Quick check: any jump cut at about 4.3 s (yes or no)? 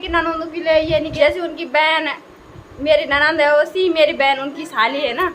no